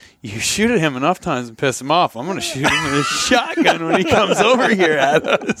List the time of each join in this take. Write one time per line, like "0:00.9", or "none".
none

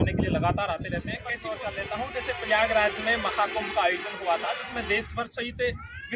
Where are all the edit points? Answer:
0:01.4

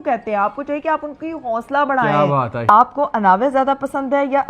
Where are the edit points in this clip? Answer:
0:02.6

